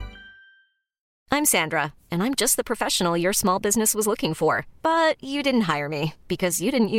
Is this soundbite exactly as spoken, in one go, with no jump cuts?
no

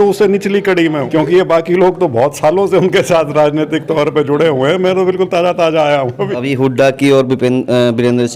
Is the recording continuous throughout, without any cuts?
no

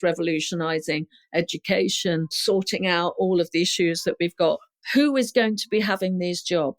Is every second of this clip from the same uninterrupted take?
no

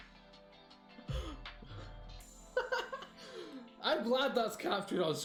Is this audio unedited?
yes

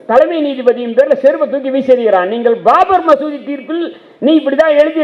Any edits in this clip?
no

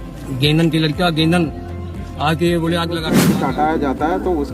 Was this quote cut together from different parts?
yes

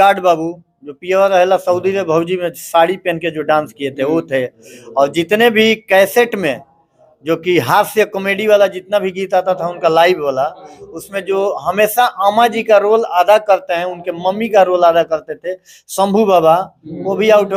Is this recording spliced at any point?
no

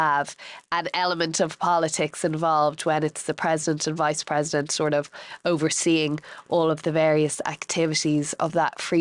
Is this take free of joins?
yes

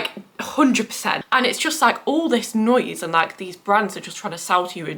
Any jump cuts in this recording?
yes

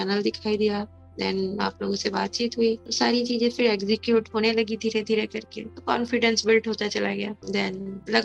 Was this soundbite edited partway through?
no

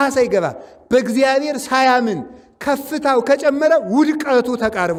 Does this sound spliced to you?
no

